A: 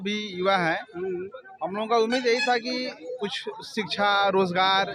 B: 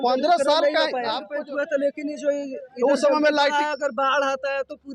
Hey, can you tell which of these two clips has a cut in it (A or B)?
B